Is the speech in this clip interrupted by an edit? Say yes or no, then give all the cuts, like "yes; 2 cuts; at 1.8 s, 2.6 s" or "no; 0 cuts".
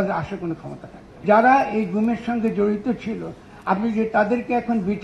yes; 1 cut; at 1.2 s